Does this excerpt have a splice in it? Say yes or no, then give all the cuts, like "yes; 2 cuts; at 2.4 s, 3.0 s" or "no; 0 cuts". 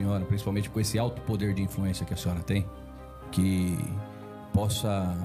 no; 0 cuts